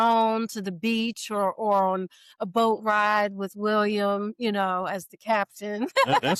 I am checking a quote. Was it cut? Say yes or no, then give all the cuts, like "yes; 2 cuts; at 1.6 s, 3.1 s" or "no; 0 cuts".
no; 0 cuts